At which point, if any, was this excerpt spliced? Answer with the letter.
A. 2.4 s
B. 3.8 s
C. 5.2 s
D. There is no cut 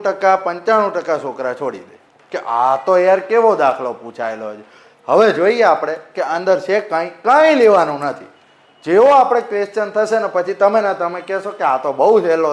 D